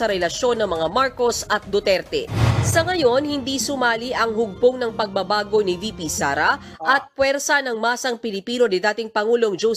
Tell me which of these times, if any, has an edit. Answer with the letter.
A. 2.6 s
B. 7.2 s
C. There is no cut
A